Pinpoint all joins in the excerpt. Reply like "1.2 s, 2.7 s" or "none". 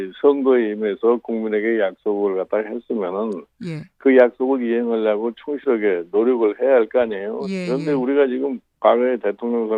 none

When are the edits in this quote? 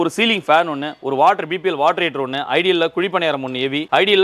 none

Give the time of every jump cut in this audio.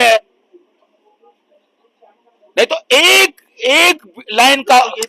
none

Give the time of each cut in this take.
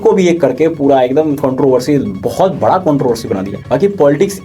3.5 s

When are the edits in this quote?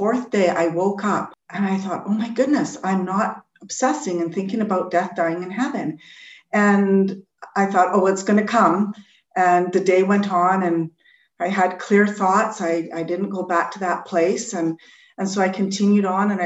1.4 s

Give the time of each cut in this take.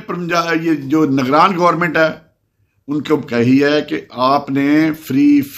none

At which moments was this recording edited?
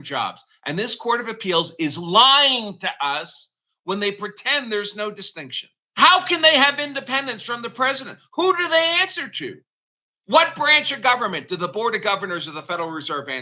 5.8 s

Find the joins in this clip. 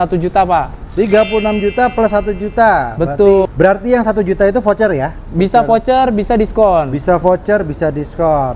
none

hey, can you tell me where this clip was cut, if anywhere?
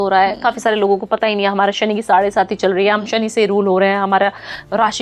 none

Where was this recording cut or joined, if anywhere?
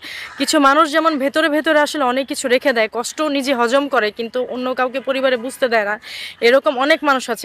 none

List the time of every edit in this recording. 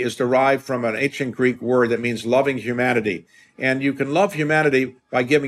none

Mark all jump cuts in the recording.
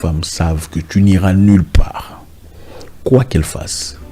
none

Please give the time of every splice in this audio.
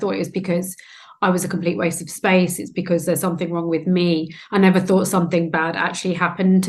none

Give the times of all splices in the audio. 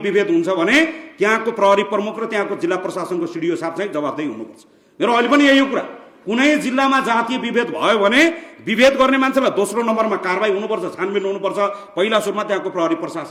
none

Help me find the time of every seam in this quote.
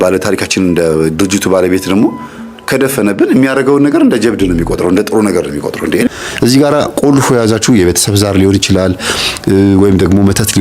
6.1 s

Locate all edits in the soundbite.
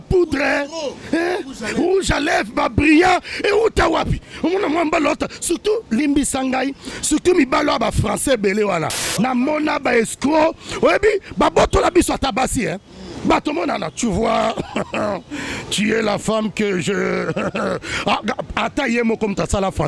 none

